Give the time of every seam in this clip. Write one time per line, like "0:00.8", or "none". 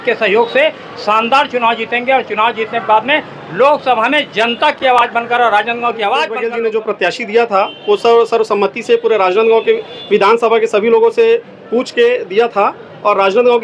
0:06.4